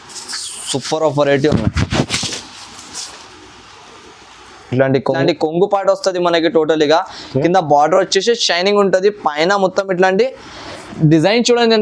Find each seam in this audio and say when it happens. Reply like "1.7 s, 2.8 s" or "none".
5.1 s